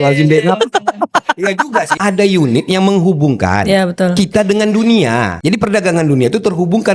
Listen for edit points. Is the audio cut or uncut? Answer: cut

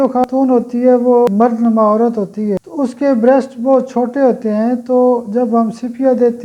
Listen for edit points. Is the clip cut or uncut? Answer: cut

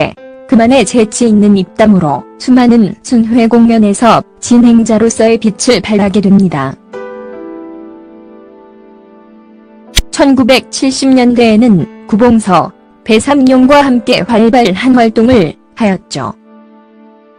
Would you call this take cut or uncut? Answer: uncut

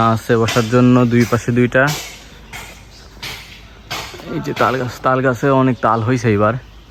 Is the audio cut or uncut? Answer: uncut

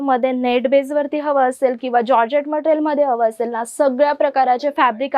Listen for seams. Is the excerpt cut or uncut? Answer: uncut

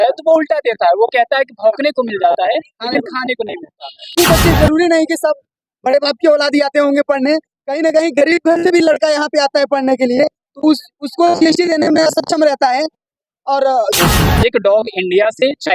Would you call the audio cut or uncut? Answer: cut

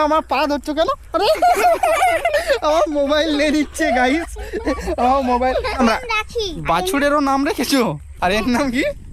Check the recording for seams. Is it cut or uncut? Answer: cut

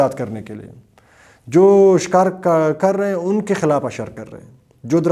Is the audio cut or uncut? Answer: uncut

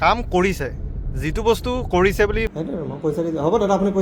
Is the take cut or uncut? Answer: cut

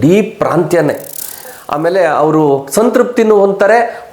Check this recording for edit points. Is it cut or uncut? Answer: cut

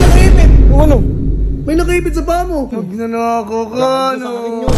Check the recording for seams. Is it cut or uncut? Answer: cut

